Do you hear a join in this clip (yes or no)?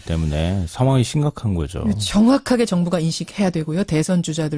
no